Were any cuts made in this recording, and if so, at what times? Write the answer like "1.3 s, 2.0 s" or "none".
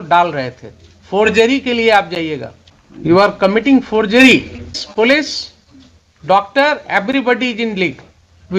3.2 s, 4.8 s